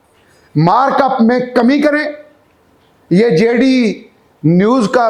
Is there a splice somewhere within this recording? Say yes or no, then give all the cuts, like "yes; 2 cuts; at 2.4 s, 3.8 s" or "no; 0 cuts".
no; 0 cuts